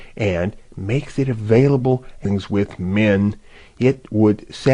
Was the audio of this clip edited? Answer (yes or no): no